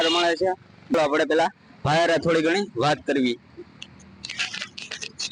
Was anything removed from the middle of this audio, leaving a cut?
yes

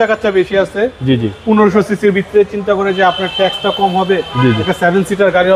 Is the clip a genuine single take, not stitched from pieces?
yes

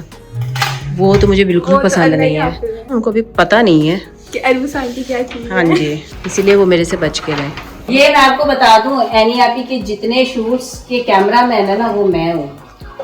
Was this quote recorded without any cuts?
no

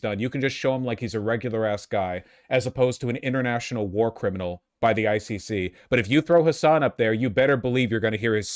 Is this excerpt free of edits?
yes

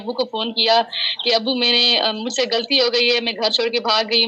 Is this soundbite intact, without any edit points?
yes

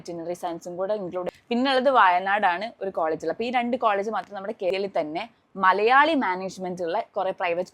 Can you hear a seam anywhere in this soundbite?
yes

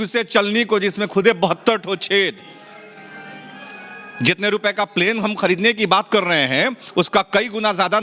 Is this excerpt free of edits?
yes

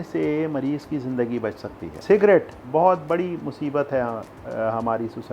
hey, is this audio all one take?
no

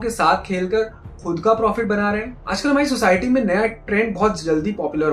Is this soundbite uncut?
no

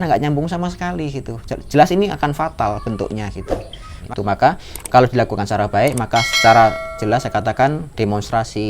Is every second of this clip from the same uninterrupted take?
no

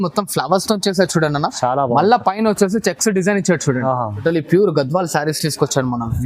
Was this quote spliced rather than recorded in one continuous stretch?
yes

